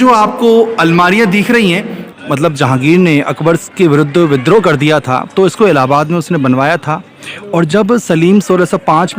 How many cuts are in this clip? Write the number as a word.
one